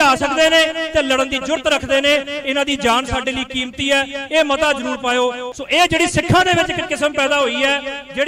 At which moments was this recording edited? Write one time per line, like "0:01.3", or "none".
0:05.4